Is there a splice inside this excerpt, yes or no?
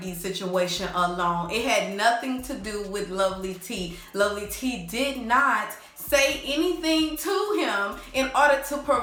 no